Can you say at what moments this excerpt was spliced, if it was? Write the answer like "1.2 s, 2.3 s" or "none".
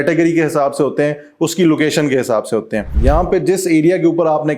2.9 s